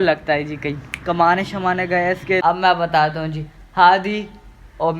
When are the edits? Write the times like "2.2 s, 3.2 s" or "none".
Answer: 2.4 s

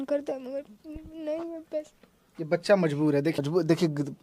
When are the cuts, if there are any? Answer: 3.3 s

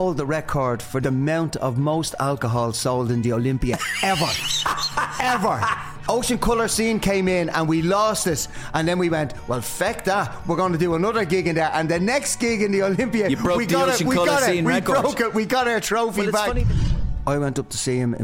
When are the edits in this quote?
1.0 s, 5.9 s, 16.9 s

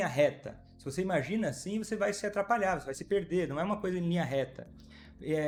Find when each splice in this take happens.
none

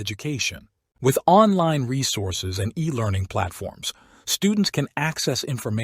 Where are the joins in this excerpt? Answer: 3.2 s

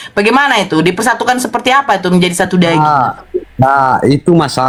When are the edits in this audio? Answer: none

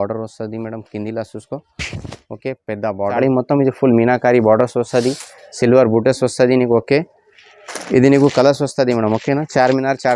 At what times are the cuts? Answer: 3.2 s

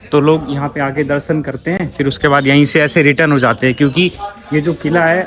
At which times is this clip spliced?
none

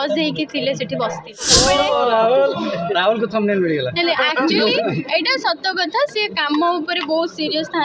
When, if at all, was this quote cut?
1.5 s

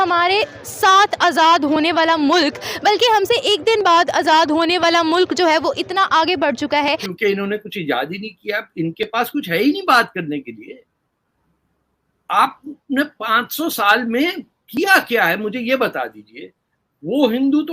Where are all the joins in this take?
7.1 s

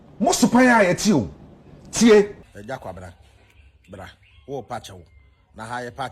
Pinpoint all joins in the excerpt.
2.4 s

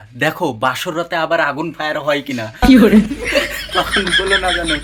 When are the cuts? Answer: none

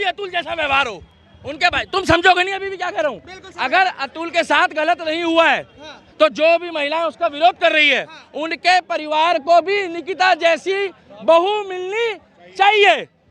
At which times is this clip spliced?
none

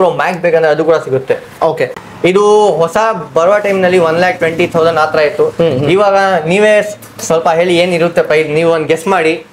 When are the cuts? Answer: 2.0 s

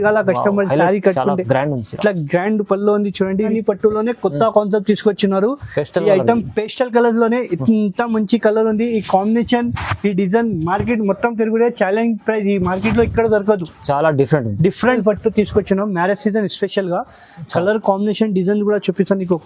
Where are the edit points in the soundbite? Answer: 3.5 s, 15.0 s

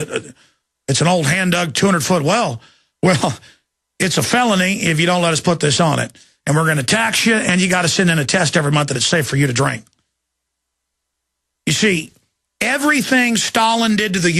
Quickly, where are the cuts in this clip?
4.1 s

